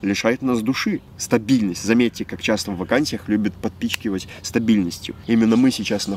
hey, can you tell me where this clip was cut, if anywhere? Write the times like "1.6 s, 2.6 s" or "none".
1.1 s, 5.1 s